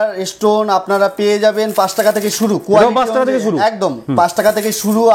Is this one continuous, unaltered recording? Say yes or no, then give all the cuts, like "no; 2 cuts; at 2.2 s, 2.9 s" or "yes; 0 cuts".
yes; 0 cuts